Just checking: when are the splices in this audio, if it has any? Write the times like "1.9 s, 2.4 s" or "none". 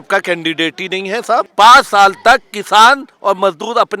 1.5 s